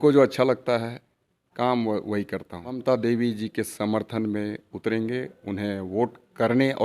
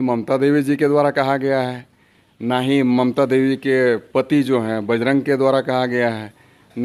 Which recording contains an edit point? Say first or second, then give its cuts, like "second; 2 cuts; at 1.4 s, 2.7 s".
first; 1 cut; at 2.8 s